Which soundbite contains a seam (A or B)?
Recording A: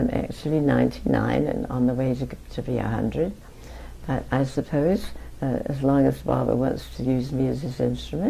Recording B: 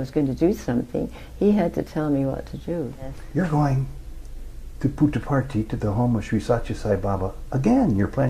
B